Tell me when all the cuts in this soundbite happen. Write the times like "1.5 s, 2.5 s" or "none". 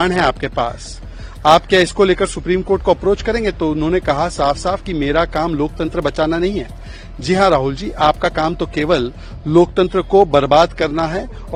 none